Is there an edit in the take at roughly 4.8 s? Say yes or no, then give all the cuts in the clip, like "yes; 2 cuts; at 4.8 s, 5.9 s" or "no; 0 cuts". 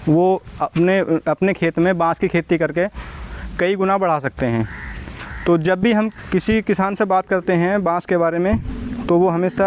no; 0 cuts